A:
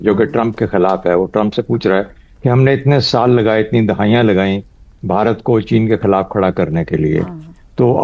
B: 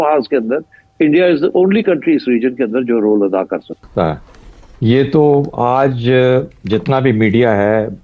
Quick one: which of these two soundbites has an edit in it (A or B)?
B